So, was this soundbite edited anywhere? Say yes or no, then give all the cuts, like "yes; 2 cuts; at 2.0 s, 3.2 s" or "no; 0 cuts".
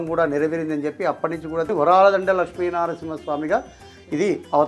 yes; 1 cut; at 1.7 s